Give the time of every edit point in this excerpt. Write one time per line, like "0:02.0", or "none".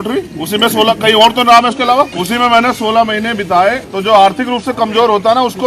0:02.1
0:03.9